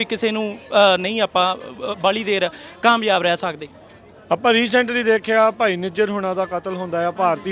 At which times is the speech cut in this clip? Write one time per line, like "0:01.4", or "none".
none